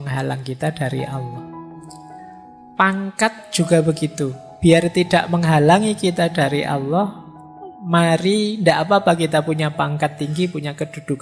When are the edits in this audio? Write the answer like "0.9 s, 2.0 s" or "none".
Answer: 1.2 s, 2.7 s

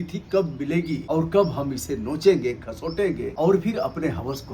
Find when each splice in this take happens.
1.0 s, 3.3 s

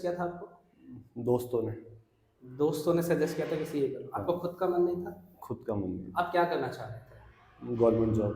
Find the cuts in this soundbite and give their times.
none

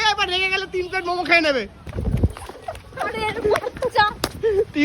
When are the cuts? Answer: 1.8 s

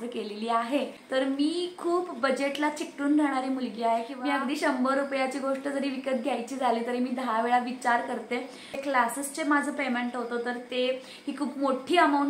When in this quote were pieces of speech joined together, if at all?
1.0 s, 4.1 s, 8.8 s

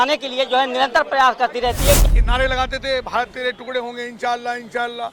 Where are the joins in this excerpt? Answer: 2.0 s

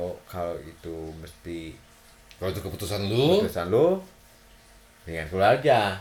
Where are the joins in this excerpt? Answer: none

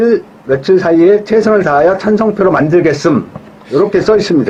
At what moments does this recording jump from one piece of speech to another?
none

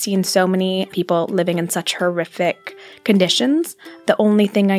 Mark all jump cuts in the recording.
0.9 s, 4.0 s

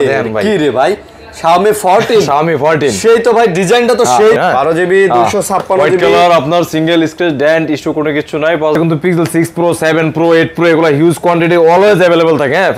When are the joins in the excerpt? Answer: 4.4 s, 8.8 s

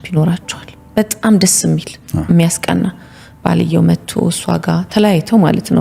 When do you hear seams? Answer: none

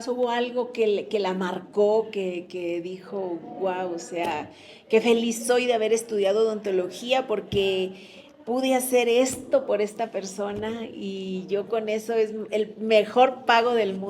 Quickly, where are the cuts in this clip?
none

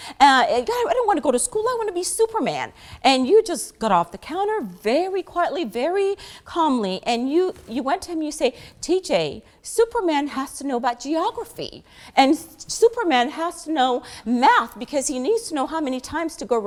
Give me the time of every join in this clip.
none

